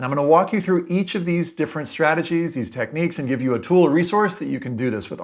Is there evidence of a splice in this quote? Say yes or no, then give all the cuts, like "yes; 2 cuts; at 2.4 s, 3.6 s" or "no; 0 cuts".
no; 0 cuts